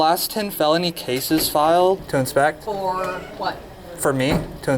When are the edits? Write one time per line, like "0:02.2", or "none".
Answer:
0:02.1
0:03.6

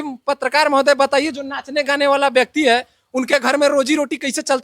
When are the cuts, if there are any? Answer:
none

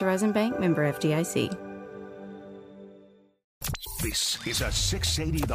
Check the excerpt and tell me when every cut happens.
0:03.6

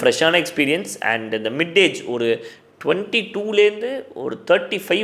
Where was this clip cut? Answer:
none

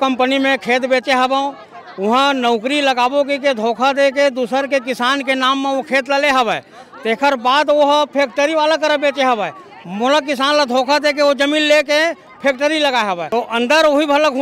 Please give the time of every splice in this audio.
0:13.2

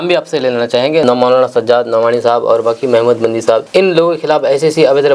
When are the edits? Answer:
0:01.0
0:03.7

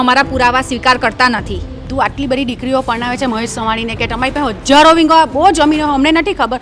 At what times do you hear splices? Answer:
0:01.8

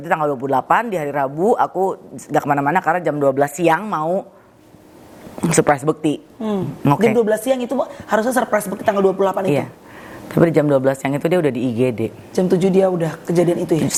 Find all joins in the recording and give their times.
none

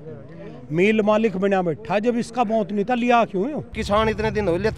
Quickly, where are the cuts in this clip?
0:03.8

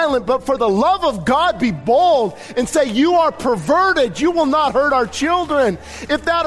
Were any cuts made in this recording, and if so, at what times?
none

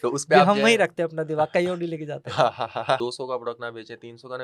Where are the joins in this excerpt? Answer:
0:03.0

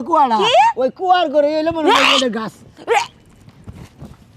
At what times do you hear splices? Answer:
none

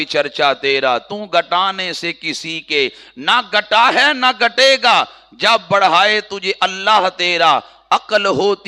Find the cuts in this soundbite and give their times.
none

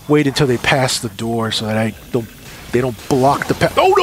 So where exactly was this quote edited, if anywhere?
none

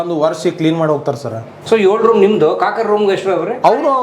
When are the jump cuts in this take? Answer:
0:01.5

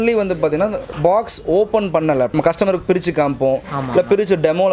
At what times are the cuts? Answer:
0:02.4

